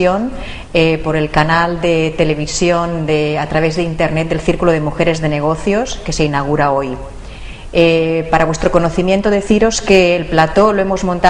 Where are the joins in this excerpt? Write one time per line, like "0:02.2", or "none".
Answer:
0:06.9